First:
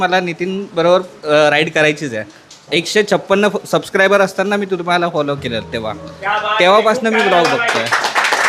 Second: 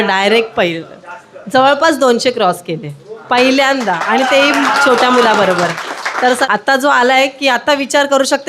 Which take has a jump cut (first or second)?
second